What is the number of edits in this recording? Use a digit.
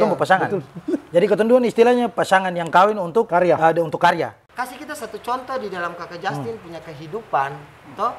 2